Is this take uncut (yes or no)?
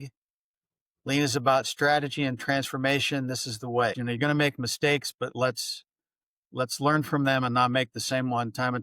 no